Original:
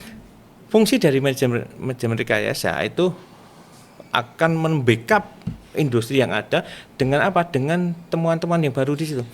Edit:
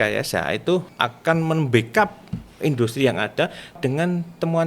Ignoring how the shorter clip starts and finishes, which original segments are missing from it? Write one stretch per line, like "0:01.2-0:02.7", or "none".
0:03.2-0:04.0
0:06.9-0:07.5

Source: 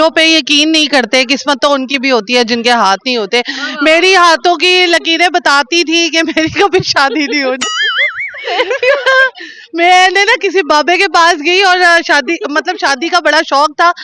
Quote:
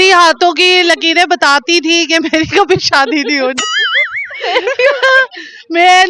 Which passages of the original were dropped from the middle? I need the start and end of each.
none

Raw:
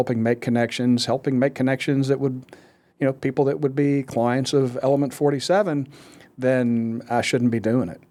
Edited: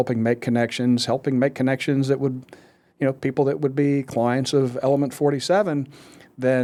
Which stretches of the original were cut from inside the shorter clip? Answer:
none

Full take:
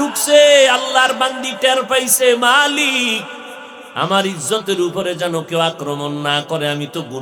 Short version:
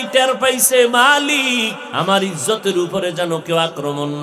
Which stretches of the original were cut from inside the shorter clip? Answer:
0:03.3-0:03.8

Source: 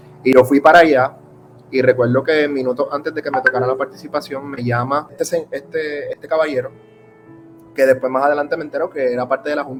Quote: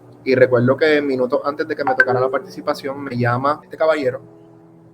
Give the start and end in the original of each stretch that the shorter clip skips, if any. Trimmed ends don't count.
0:05.1-0:06.1

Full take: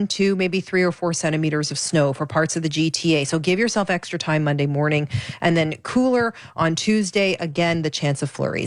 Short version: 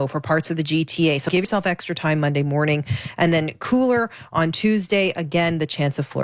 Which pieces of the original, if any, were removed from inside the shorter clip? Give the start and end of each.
0:03.5-0:03.7

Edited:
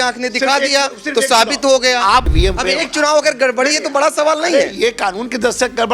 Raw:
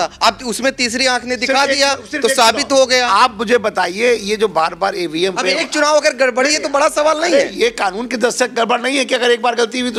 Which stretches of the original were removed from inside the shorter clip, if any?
0:03.4-0:05.1

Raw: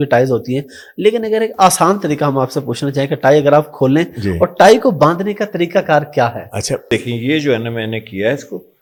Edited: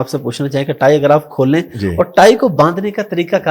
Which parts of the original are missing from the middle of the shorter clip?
none

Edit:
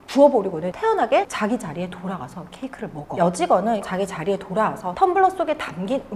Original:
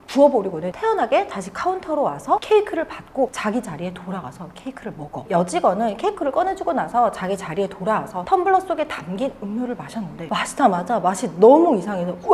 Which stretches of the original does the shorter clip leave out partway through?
0:01.3-0:03.4
0:05.2-0:05.3
0:06.0-0:07.1

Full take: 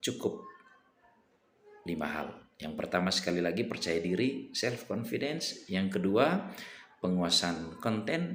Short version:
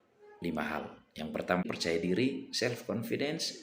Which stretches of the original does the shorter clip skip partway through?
0:03.1-0:03.6

